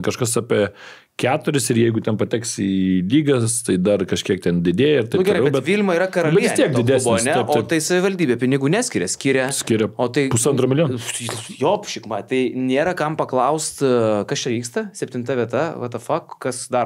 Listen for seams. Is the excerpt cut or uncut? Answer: uncut